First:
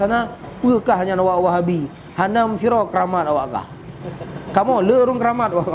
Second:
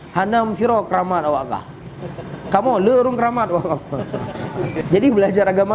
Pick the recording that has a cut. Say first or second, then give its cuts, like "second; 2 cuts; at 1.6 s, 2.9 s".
second; 1 cut; at 4.8 s